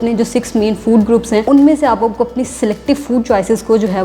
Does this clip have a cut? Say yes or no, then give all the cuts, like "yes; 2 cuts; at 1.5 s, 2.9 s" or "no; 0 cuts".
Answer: yes; 1 cut; at 1.4 s